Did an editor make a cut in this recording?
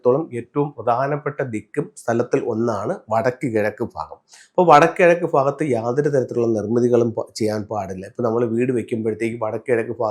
no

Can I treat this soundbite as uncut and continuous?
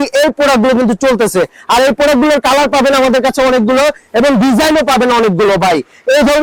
yes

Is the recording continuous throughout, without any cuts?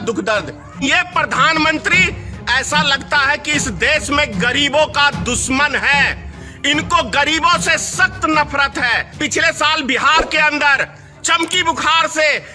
no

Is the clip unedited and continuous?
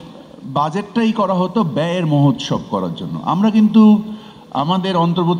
yes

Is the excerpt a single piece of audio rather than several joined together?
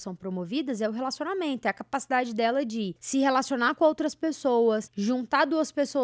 no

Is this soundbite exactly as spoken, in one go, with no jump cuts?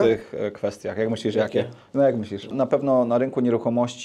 no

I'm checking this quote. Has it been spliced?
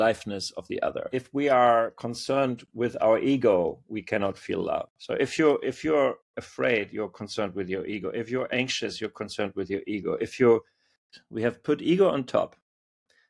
yes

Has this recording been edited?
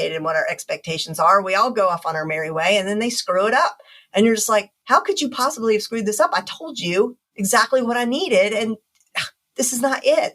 yes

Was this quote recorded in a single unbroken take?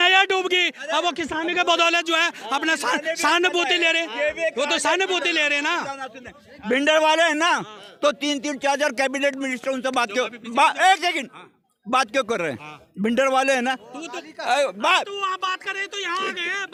yes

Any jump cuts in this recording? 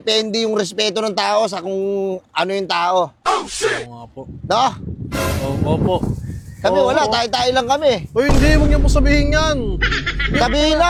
no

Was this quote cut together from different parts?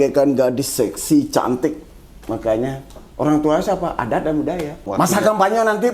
yes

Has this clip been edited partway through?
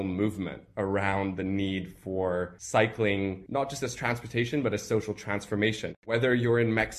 yes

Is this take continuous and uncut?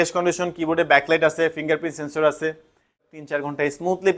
no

